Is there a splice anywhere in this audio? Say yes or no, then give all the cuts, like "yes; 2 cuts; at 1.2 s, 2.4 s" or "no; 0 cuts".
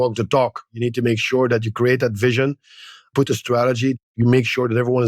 yes; 1 cut; at 3.1 s